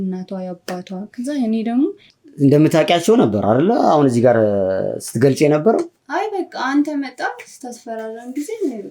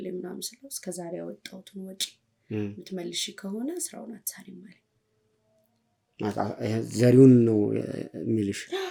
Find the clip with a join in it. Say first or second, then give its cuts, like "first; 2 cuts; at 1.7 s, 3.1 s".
first; 1 cut; at 2.1 s